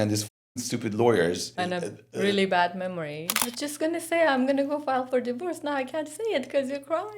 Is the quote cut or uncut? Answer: cut